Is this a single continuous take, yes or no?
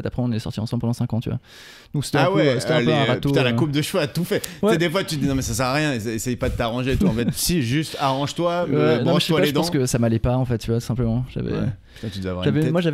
yes